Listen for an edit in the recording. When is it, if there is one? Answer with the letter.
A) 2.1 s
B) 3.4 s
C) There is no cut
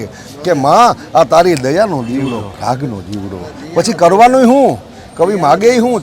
C